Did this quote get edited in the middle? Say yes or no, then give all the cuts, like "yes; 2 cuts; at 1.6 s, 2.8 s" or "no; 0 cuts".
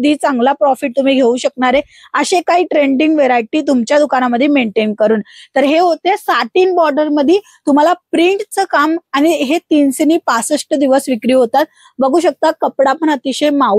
no; 0 cuts